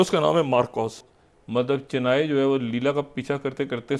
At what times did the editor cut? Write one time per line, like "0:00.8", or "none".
0:01.0